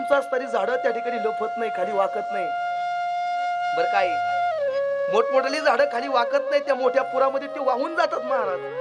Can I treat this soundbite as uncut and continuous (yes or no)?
yes